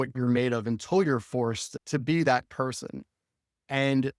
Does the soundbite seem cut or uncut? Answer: cut